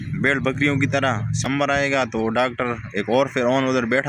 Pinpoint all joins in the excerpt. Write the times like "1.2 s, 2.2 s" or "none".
1.5 s

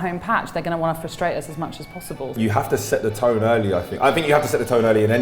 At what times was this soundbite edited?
2.3 s

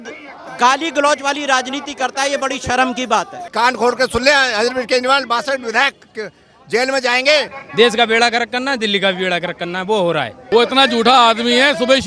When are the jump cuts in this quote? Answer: 3.4 s, 7.6 s, 10.4 s

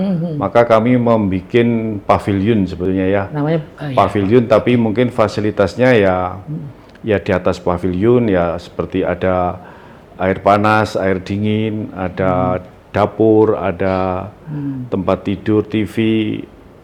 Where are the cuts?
none

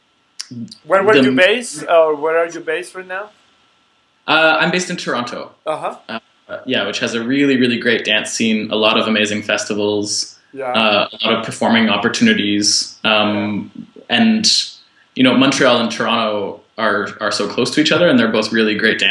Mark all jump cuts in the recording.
12.0 s

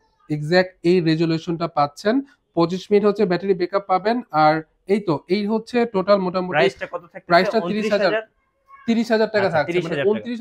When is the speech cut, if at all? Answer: none

